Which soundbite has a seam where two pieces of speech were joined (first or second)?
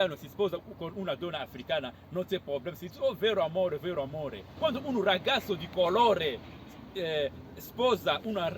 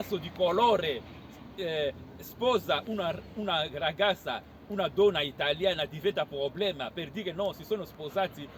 first